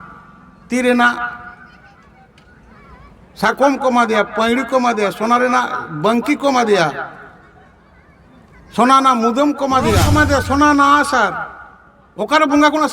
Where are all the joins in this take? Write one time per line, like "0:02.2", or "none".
0:10.1